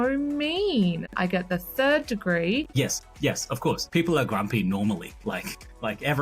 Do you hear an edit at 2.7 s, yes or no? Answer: yes